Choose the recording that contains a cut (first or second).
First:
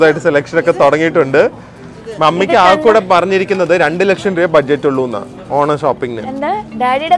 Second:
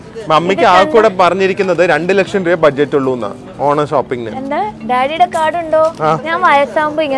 second